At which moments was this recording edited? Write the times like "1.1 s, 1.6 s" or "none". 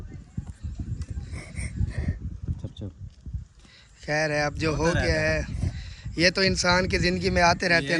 none